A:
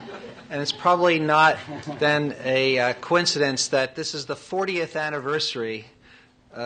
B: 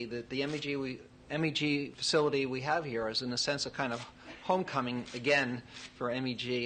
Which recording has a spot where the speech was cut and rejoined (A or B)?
B